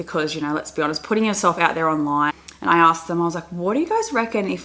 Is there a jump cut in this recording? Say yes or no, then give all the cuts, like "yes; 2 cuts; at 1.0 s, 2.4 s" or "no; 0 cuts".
yes; 1 cut; at 2.3 s